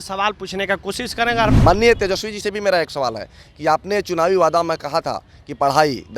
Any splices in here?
yes; 1 cut; at 1.5 s

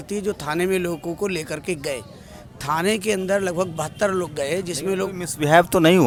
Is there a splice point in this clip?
no; 0 cuts

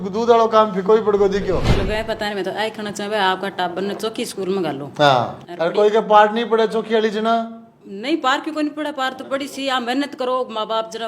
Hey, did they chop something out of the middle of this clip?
yes; 2 cuts; at 1.7 s, 5.4 s

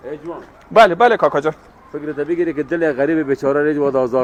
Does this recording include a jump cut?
no; 0 cuts

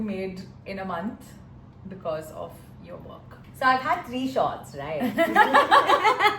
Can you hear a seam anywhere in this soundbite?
no; 0 cuts

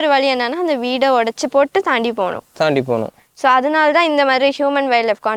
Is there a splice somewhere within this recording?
no; 0 cuts

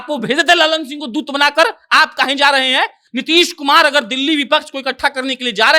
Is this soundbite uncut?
no; 1 cut; at 3.0 s

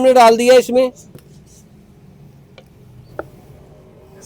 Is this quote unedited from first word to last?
yes; 0 cuts

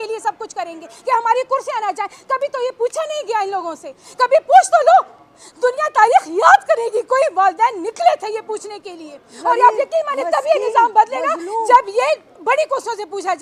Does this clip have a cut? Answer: no; 0 cuts

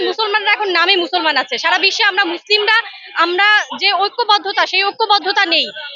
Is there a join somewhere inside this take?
no; 0 cuts

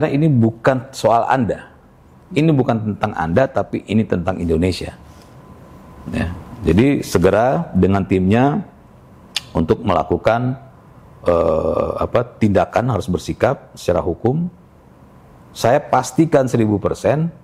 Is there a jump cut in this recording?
no; 0 cuts

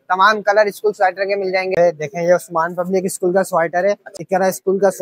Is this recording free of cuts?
no; 2 cuts; at 1.7 s, 4.1 s

